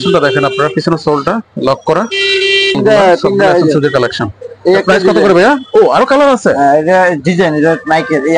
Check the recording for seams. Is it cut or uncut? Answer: cut